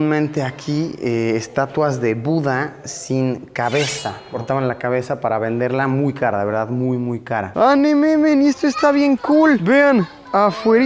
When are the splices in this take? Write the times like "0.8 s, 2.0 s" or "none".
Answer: 4.3 s, 7.5 s